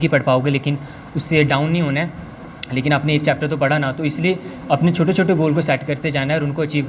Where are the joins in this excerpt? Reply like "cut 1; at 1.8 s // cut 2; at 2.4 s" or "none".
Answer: none